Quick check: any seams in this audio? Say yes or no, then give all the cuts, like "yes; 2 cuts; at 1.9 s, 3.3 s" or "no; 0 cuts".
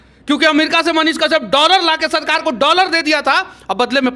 no; 0 cuts